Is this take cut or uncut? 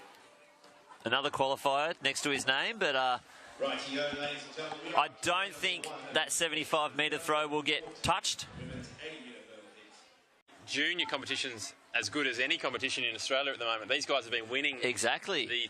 cut